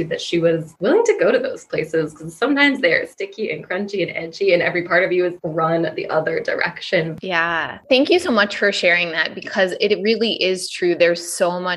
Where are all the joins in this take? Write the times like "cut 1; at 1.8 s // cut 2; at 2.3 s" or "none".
cut 1; at 7.1 s